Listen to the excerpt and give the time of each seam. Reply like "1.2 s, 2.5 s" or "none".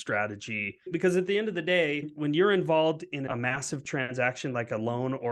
0.9 s, 2.1 s, 3.3 s

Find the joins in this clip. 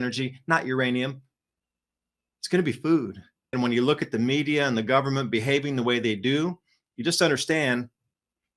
3.5 s

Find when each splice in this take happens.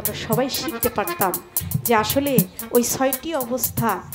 none

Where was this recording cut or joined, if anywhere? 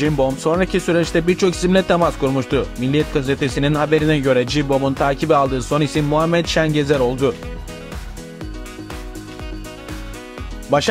none

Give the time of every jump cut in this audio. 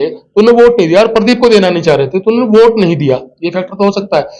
none

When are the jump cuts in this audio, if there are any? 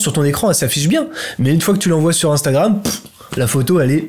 none

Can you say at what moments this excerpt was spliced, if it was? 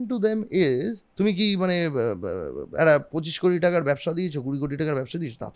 1.0 s

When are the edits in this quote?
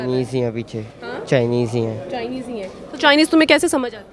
none

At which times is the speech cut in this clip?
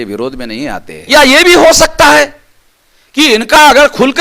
0.9 s

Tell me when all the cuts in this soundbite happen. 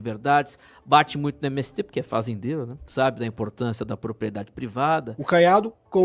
5.1 s

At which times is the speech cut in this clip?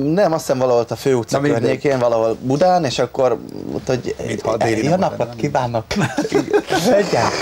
5.3 s

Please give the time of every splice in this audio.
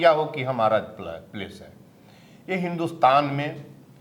none

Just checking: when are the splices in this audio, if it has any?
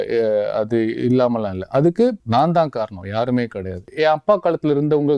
2.2 s, 3.9 s

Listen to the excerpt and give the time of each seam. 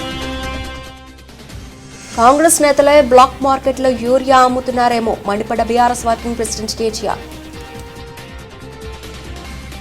1.8 s

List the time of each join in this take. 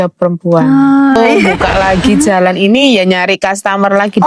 1.6 s

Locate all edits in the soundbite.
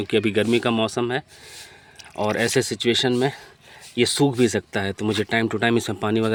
none

